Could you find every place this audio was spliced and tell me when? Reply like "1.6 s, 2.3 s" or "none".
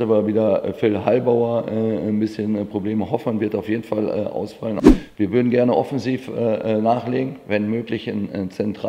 4.8 s